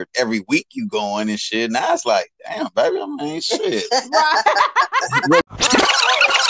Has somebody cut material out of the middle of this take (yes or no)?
yes